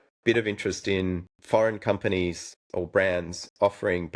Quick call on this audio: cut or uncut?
cut